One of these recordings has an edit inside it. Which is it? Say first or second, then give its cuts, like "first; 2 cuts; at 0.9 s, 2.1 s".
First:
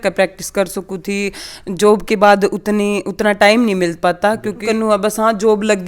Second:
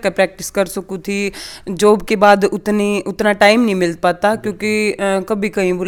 first; 1 cut; at 4.6 s